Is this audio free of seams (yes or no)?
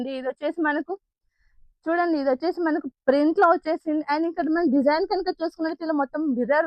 yes